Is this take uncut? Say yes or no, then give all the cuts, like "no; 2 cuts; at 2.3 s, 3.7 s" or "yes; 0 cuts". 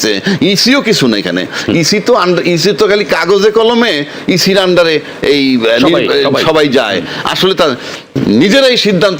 yes; 0 cuts